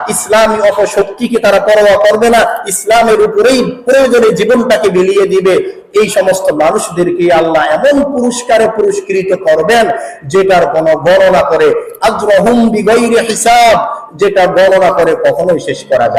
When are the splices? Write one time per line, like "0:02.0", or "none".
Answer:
none